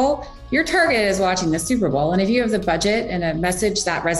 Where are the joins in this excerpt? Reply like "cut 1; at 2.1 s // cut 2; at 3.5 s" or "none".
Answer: none